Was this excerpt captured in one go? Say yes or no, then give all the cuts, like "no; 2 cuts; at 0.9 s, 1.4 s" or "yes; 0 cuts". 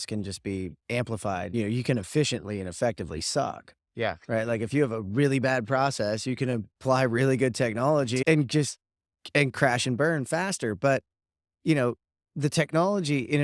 no; 2 cuts; at 1.5 s, 8.2 s